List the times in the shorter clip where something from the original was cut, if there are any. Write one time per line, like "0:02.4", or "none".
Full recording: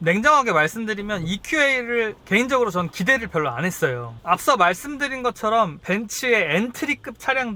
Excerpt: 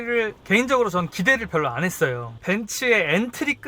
0:02.4